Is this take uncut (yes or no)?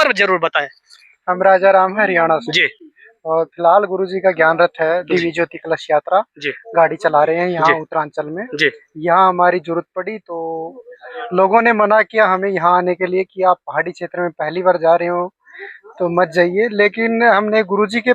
yes